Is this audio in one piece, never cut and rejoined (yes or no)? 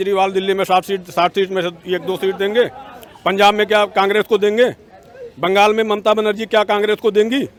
yes